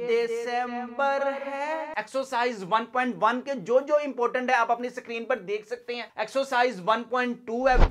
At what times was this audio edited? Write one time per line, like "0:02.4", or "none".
0:01.9